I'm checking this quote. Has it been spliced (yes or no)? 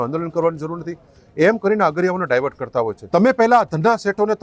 yes